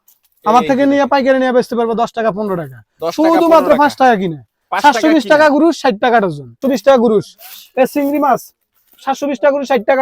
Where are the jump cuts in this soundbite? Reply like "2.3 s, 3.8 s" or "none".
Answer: 6.6 s